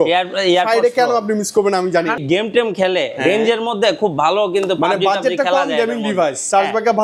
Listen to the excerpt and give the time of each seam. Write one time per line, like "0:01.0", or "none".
0:02.2